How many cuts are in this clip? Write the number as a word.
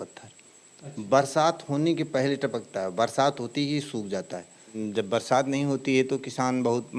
one